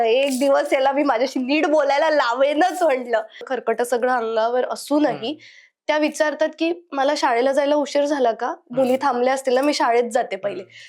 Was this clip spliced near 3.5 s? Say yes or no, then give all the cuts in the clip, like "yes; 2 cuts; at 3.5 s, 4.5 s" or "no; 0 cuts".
yes; 1 cut; at 3.5 s